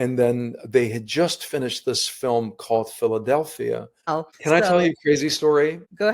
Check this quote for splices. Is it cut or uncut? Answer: cut